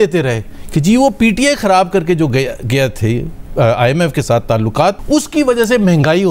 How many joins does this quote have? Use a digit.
0